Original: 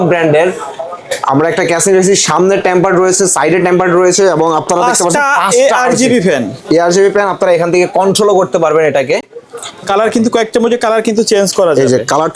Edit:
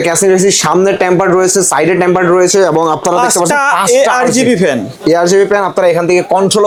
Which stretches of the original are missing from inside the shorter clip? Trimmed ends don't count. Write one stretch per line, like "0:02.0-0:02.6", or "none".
none